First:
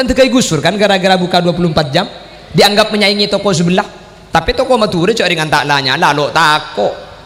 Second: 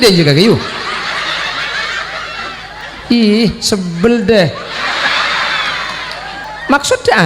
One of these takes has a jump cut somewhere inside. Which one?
second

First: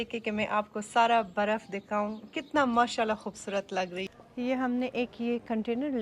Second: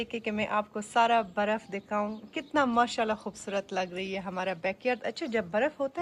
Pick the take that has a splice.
first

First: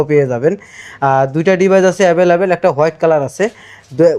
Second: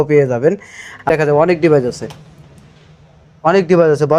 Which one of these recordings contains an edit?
second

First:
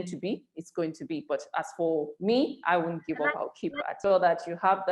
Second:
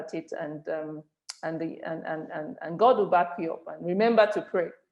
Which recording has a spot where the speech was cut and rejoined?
first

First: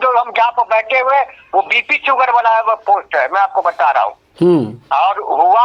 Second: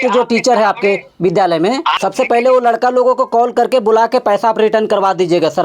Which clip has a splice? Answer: second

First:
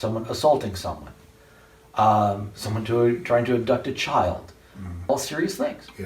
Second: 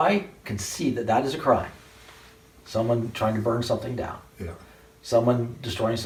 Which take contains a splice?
first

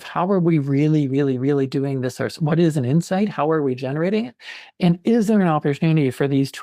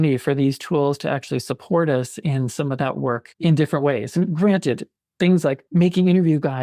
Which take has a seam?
second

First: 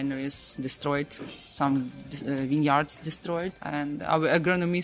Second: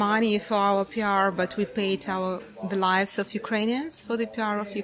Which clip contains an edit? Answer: first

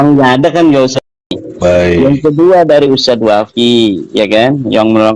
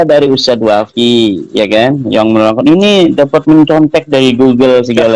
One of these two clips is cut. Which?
first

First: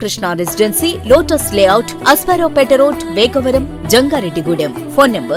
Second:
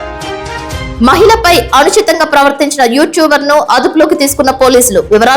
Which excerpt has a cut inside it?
second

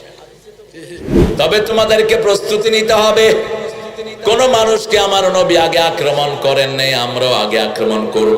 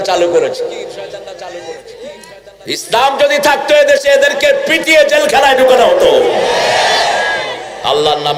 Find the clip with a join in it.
first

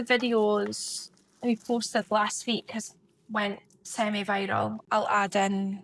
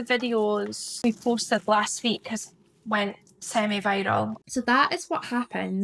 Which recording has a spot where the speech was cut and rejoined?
second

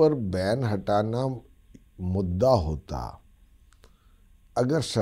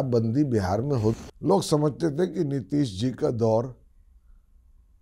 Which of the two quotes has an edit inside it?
second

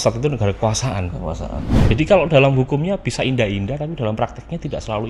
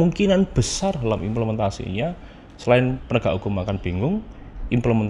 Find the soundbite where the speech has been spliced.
first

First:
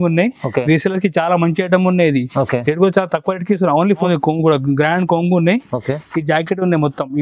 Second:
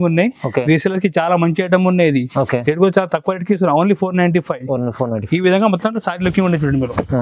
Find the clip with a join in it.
first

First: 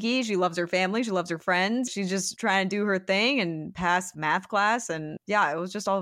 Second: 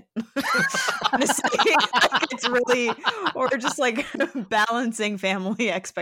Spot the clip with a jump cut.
first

